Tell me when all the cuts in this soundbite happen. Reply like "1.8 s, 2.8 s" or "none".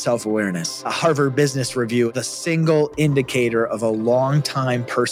0.9 s, 2.1 s